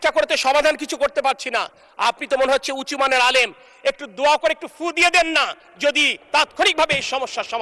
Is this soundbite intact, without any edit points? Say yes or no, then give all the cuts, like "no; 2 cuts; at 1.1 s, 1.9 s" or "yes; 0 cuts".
yes; 0 cuts